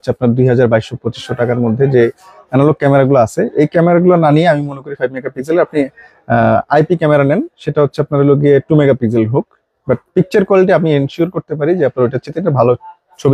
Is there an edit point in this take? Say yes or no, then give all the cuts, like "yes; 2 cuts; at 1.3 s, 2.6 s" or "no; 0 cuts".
no; 0 cuts